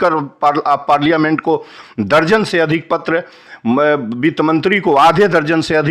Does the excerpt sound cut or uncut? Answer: uncut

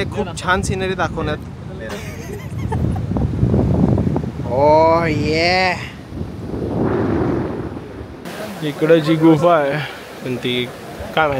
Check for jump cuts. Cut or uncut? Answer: cut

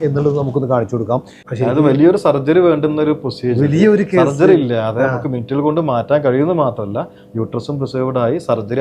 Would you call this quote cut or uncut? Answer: cut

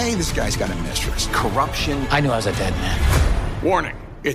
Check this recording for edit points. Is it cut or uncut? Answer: uncut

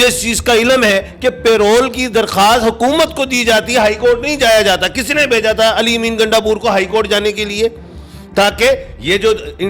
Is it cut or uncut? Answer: uncut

